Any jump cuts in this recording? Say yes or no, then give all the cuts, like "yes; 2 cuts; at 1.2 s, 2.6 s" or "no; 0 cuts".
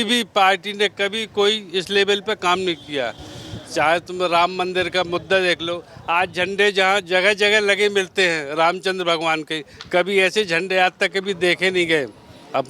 no; 0 cuts